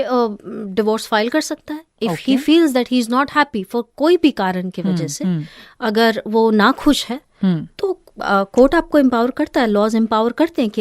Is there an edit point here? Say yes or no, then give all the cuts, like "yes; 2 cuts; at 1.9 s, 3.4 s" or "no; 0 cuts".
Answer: no; 0 cuts